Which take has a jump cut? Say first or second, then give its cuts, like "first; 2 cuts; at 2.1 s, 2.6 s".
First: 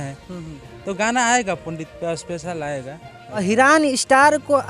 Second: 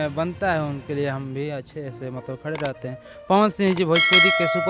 first; 1 cut; at 3.4 s